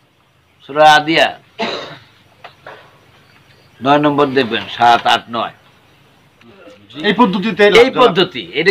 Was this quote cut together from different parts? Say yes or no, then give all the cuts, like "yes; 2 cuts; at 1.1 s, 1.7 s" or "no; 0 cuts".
yes; 1 cut; at 6.7 s